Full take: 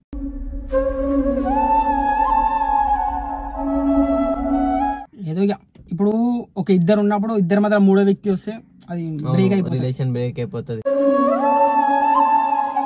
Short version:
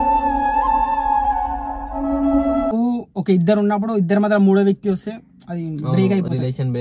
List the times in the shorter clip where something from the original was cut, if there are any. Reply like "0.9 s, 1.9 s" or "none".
2.7 s